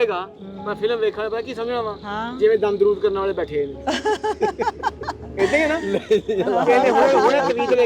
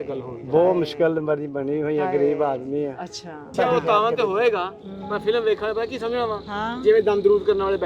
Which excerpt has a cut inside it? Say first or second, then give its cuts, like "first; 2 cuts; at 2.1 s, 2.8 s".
second; 1 cut; at 3.5 s